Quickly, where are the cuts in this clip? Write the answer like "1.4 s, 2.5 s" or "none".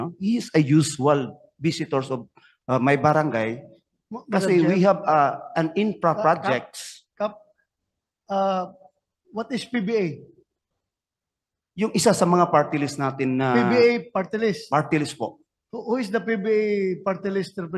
none

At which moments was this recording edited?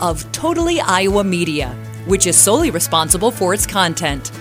none

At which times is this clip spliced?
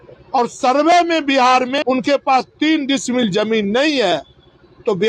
1.8 s

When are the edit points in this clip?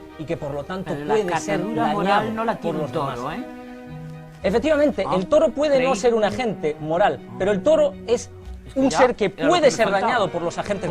none

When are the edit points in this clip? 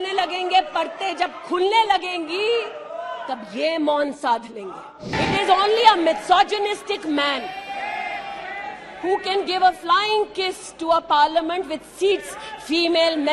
5.1 s

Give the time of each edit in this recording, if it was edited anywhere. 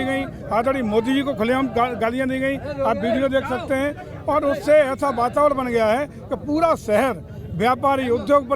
none

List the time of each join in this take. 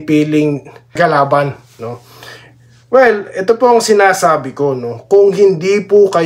1.0 s

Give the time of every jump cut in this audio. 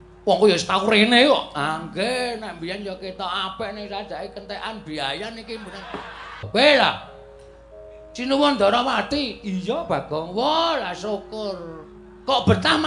6.5 s

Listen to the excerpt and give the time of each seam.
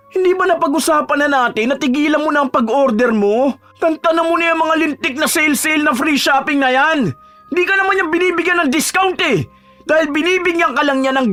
none

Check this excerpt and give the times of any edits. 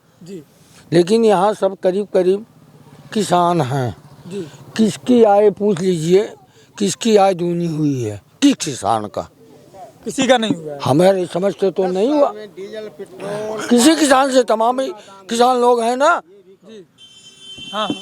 none

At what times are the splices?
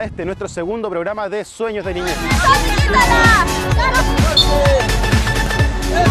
none

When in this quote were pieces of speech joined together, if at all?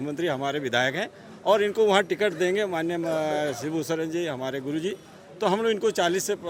none

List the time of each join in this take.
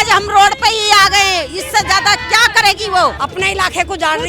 3.2 s

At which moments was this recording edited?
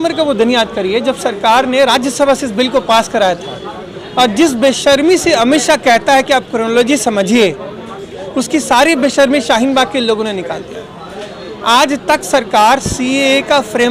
none

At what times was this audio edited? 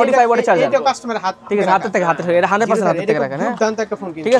none

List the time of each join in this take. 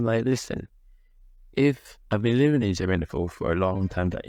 none

